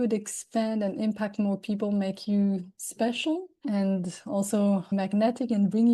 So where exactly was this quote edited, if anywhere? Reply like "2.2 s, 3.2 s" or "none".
4.9 s